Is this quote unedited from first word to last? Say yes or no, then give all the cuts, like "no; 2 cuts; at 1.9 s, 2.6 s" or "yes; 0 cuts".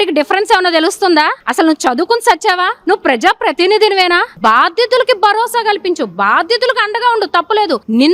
yes; 0 cuts